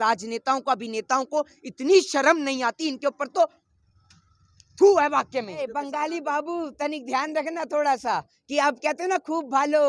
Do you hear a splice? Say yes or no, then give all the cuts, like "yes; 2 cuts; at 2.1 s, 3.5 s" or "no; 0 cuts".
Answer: yes; 1 cut; at 5.6 s